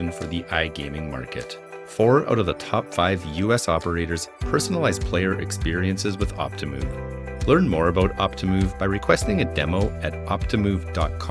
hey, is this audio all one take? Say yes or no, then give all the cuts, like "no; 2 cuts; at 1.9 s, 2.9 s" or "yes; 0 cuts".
yes; 0 cuts